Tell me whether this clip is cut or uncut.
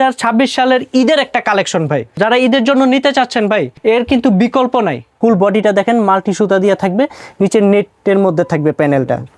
cut